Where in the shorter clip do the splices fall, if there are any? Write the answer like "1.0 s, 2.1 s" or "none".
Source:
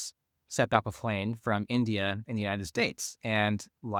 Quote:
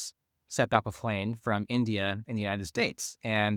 none